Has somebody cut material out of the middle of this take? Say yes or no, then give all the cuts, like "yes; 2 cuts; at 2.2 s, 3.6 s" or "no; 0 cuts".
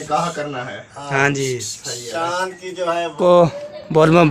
yes; 1 cut; at 3.2 s